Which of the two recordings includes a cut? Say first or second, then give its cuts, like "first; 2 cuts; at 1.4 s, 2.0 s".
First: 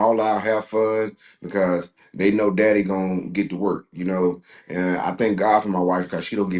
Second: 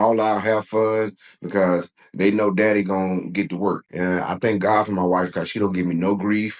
second; 1 cut; at 3.9 s